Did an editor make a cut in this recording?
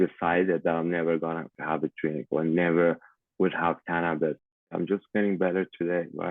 yes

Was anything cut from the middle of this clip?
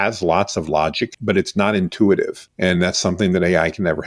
yes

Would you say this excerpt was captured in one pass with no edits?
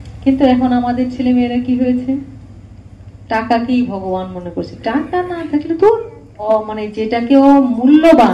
no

